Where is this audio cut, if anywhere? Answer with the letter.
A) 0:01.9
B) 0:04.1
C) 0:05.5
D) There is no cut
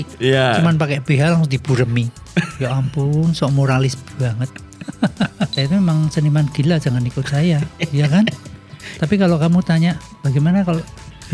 C